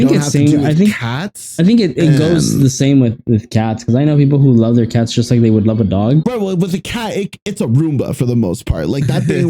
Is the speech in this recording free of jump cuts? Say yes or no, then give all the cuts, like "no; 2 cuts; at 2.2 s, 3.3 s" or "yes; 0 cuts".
no; 1 cut; at 6.2 s